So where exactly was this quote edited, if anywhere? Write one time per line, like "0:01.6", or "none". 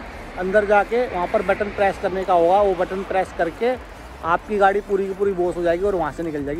none